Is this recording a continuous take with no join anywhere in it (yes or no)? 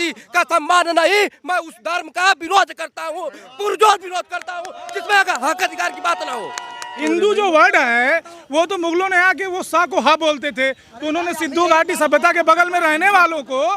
no